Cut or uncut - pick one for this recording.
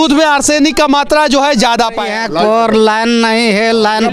cut